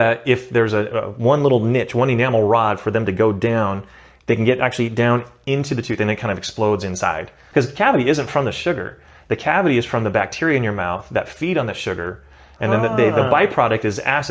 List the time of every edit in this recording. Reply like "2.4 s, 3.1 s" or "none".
7.3 s